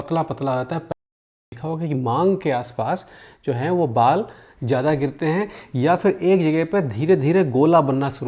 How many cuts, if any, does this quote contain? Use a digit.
1